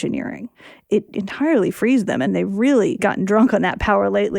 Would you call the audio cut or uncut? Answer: cut